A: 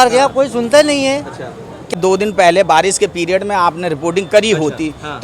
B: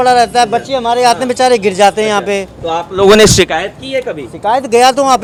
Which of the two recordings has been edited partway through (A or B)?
A